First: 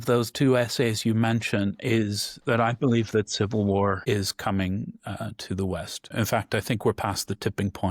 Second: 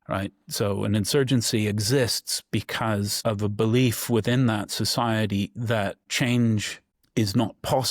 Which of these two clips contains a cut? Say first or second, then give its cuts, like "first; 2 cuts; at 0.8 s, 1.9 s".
second; 1 cut; at 3.1 s